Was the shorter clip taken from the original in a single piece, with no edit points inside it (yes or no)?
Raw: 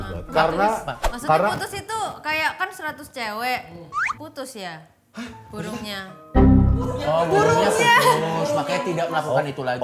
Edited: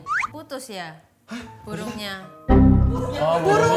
yes